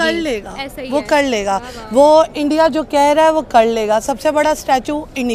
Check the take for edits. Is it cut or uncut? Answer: uncut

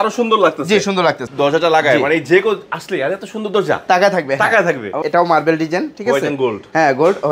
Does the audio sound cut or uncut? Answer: cut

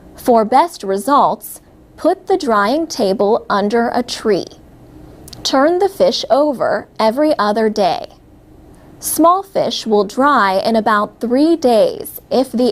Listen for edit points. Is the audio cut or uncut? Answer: cut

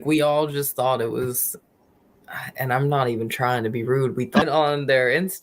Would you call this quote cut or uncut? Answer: cut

